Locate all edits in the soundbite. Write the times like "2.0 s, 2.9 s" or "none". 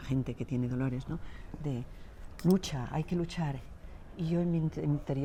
none